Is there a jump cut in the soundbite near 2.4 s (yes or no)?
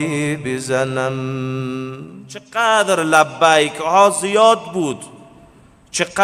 yes